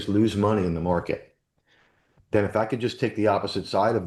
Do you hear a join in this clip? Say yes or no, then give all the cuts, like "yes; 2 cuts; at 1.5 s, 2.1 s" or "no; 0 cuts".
no; 0 cuts